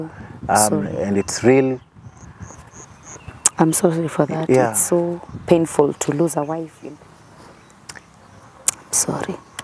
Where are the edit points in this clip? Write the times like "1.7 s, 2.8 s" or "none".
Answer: 6.7 s